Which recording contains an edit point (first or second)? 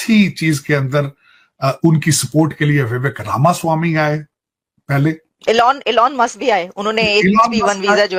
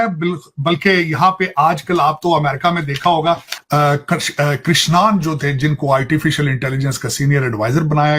second